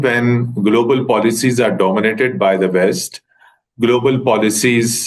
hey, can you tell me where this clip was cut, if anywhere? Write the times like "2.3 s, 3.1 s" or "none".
none